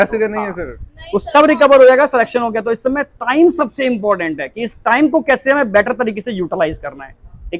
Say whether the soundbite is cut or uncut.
uncut